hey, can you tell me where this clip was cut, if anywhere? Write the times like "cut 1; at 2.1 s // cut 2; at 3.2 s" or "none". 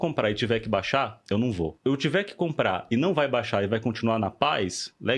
cut 1; at 1.7 s